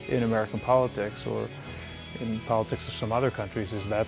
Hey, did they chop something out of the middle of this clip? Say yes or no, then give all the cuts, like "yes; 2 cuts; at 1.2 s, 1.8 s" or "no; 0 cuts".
no; 0 cuts